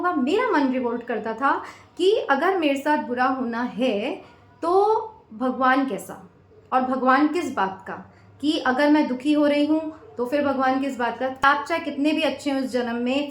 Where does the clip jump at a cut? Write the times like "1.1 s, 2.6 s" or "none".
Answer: 11.4 s